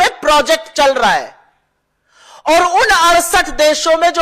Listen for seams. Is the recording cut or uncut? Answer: uncut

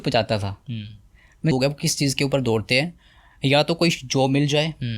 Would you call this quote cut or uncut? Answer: cut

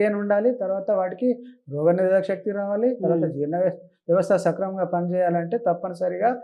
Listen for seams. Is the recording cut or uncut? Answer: uncut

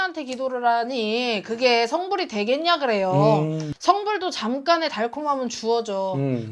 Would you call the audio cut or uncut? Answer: uncut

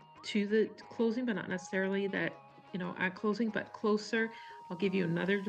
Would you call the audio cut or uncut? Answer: uncut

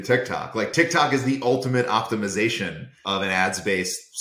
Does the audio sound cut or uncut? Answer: cut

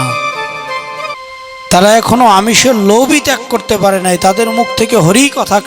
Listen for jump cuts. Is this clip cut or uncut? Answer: cut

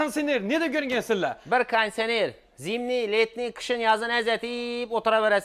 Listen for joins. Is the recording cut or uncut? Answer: uncut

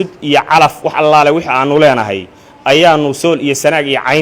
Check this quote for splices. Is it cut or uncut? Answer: uncut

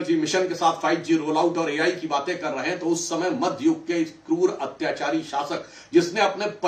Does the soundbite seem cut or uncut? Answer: uncut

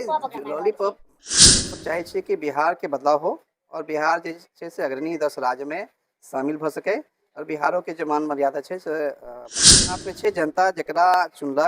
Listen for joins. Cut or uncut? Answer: cut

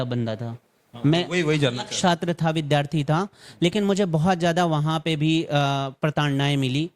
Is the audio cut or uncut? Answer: uncut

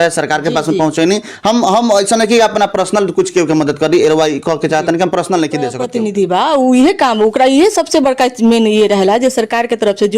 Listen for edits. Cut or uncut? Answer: cut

